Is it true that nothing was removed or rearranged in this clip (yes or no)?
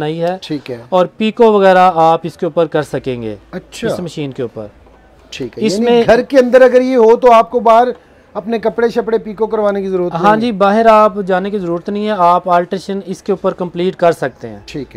yes